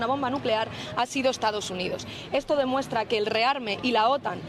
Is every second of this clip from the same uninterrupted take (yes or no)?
yes